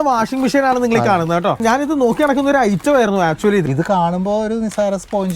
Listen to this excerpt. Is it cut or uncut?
cut